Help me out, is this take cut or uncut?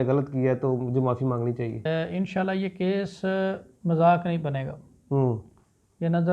cut